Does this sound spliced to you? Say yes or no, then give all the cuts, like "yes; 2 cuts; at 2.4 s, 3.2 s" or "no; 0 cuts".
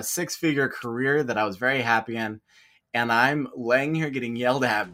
no; 0 cuts